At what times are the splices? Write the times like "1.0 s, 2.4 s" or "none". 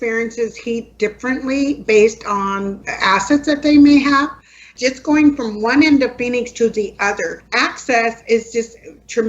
4.7 s

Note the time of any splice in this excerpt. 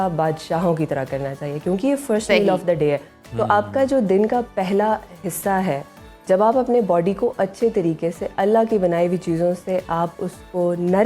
none

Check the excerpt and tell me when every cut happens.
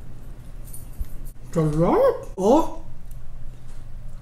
2.4 s

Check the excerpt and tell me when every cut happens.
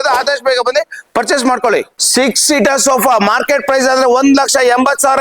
2.0 s

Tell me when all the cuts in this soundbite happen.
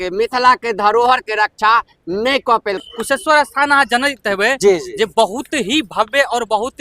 2.8 s

